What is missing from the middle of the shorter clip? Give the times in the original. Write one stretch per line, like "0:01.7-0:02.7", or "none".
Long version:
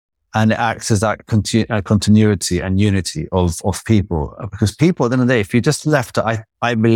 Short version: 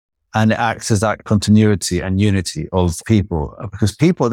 0:01.2-0:01.8
0:03.6-0:03.8